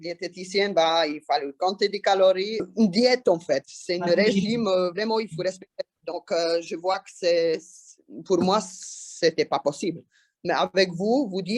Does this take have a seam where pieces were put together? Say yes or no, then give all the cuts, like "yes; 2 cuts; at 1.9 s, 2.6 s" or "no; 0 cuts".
yes; 2 cuts; at 2.6 s, 10.3 s